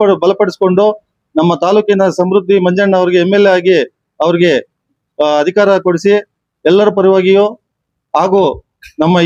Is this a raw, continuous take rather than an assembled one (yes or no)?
yes